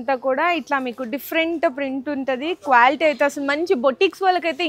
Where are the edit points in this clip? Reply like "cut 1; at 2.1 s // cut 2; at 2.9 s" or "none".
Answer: none